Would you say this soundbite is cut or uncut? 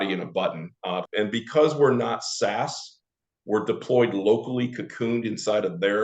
cut